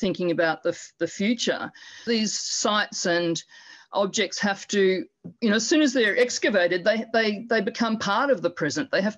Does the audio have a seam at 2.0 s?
yes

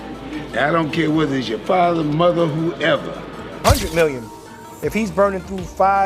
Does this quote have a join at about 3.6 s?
yes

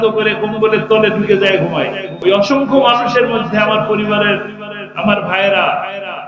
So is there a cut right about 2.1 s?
yes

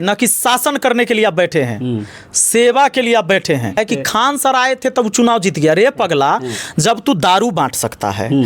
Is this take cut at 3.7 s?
yes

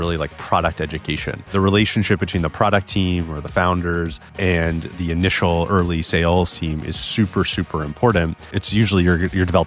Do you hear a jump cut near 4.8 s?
yes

